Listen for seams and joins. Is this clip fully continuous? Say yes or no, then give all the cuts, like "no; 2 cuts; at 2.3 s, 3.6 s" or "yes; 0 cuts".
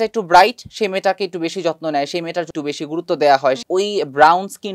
no; 2 cuts; at 2.5 s, 3.6 s